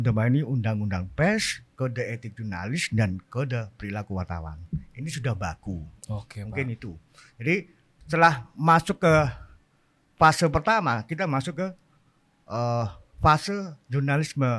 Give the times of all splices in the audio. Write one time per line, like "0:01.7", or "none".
none